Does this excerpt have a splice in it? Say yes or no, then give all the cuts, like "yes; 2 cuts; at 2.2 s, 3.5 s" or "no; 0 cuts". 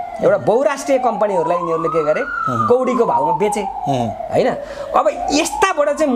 no; 0 cuts